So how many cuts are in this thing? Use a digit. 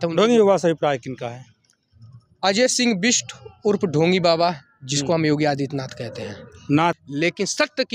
1